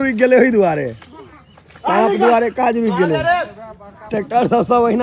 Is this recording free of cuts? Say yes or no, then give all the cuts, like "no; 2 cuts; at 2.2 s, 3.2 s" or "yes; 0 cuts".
yes; 0 cuts